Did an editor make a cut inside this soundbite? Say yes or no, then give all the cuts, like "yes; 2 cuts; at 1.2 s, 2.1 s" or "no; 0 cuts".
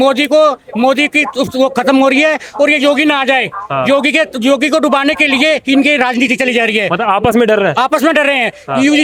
no; 0 cuts